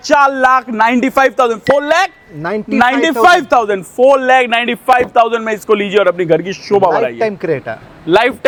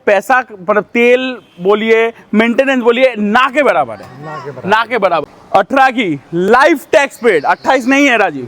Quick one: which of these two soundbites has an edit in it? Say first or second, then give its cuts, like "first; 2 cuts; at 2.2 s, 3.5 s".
second; 1 cut; at 5.4 s